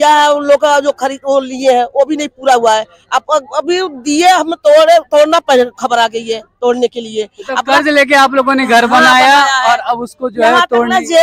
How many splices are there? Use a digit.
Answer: 0